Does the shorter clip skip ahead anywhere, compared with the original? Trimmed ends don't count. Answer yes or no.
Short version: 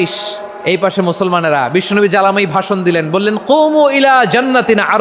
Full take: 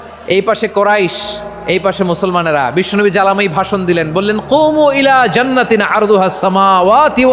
no